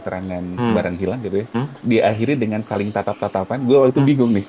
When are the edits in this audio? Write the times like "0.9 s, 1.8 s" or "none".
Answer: 1.7 s